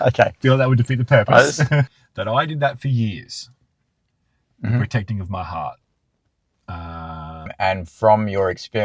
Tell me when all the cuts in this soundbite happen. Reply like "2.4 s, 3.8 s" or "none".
1.9 s, 7.5 s